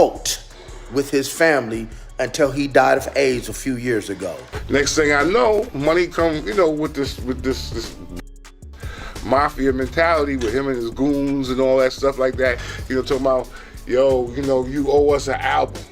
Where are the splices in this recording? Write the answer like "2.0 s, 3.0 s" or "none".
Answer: 4.5 s